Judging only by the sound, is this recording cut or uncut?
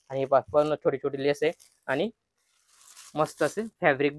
uncut